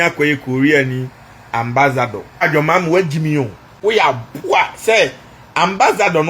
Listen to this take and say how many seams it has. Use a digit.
2